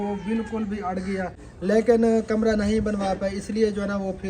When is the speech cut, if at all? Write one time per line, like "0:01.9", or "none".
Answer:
0:01.4